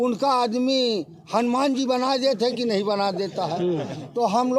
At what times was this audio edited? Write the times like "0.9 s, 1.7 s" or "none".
none